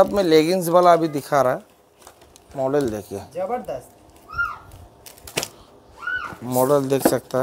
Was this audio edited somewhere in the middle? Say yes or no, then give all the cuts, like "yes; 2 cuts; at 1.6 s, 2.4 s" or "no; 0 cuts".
no; 0 cuts